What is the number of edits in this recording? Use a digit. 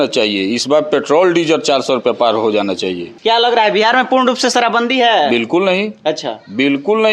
1